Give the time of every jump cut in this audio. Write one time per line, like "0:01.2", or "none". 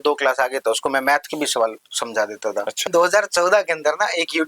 0:02.8